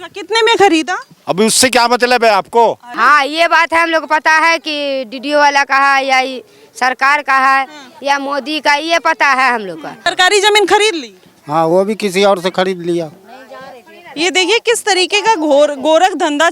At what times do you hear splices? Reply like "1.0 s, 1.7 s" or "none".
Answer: 2.9 s, 10.0 s